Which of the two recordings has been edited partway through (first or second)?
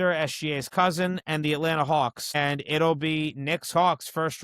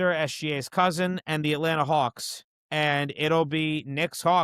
first